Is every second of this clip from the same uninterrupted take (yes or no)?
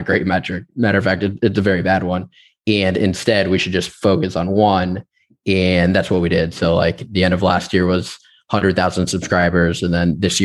yes